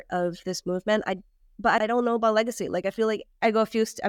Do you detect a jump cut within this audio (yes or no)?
no